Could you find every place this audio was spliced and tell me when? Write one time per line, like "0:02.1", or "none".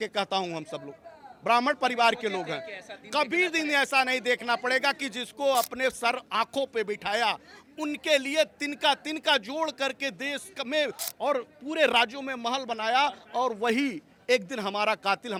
none